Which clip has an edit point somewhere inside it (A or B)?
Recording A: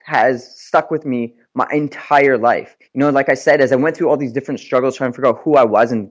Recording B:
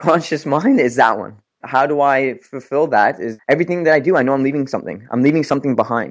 B